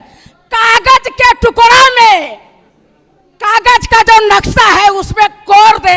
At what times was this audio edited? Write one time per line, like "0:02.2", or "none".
none